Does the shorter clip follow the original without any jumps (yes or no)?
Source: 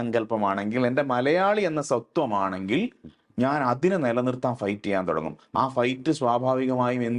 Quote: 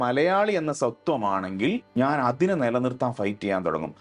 no